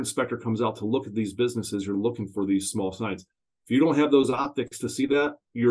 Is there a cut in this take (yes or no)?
no